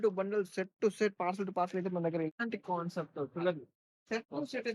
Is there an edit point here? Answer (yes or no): yes